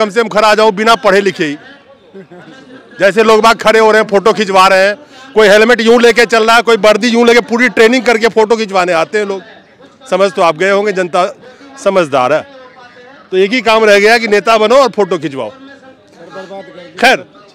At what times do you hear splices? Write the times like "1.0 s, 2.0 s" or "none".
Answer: none